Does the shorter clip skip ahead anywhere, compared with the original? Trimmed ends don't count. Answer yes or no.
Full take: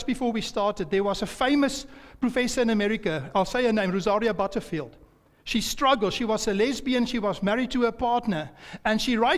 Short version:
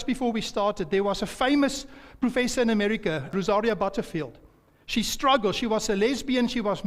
yes